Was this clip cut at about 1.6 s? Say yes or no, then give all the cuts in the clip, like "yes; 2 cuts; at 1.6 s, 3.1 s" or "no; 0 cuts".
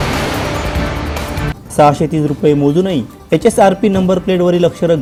no; 0 cuts